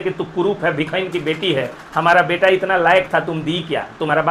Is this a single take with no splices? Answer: yes; 0 cuts

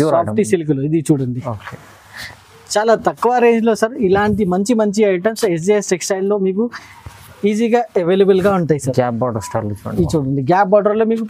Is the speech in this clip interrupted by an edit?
no; 0 cuts

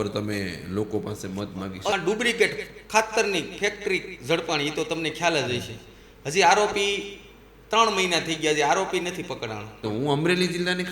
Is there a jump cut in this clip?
yes; 2 cuts; at 1.9 s, 9.8 s

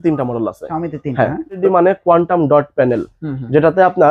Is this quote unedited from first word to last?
no; 1 cut; at 1.6 s

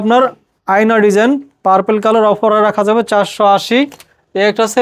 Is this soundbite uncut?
yes; 0 cuts

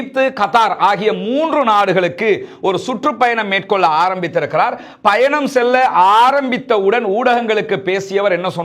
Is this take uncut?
yes; 0 cuts

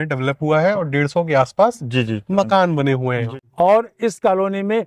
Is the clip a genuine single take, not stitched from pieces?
no; 1 cut; at 3.4 s

